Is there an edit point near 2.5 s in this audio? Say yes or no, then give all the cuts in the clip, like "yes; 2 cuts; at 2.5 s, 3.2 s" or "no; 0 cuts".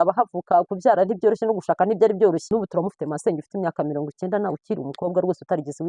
yes; 1 cut; at 2.5 s